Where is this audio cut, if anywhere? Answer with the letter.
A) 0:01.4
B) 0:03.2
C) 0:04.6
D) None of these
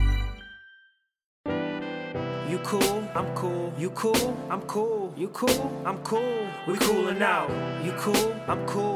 A